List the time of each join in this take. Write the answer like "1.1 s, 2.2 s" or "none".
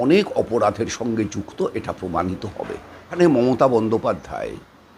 3.2 s